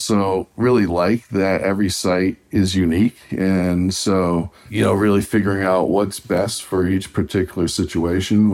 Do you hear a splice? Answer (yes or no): yes